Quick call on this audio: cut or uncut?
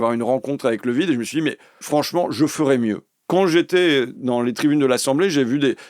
cut